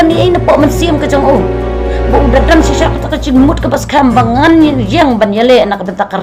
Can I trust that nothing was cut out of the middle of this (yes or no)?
yes